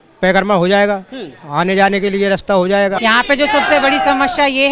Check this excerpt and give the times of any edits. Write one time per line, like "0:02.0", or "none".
0:03.0